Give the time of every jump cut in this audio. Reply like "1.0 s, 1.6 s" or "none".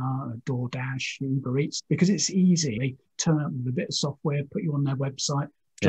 1.7 s, 2.8 s